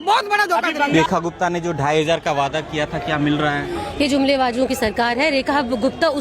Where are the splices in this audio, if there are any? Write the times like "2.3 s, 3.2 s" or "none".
0.9 s